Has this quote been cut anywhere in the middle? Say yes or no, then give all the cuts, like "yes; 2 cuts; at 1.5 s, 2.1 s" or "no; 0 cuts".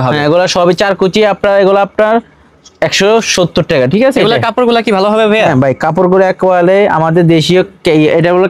no; 0 cuts